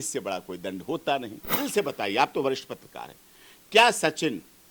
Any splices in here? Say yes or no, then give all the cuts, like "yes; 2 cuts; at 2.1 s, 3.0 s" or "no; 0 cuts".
yes; 1 cut; at 1.4 s